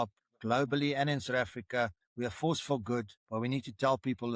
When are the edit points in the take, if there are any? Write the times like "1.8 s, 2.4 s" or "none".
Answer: 2.0 s, 3.2 s